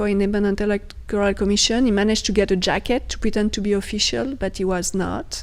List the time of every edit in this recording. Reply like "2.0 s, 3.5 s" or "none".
none